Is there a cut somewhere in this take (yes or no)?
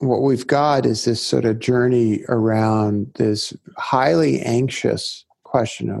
no